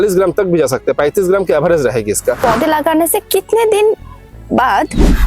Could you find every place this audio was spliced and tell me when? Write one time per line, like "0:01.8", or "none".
0:02.4